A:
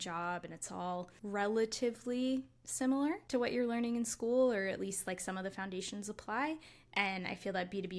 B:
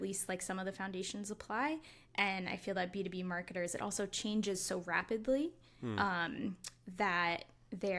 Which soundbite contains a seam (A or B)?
A